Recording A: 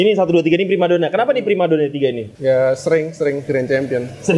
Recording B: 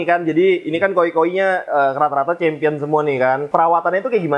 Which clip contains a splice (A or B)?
B